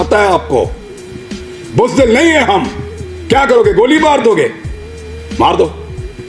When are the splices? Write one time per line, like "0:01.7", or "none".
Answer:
none